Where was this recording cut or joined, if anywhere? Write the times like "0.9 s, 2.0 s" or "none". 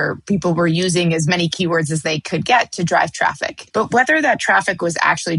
3.5 s